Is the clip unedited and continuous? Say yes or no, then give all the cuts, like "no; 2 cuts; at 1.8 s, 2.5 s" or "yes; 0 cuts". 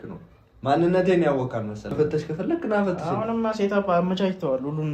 no; 1 cut; at 1.9 s